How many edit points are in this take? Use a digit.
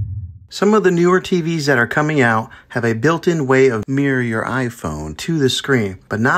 0